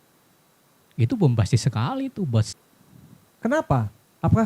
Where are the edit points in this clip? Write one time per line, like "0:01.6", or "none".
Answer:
0:02.6